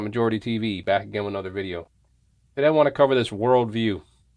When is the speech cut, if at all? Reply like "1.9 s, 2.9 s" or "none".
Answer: 2.5 s